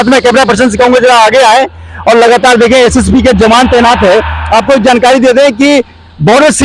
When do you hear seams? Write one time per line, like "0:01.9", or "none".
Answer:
none